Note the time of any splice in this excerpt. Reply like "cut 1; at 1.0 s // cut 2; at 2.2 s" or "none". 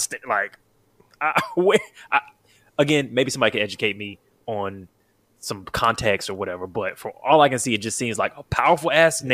none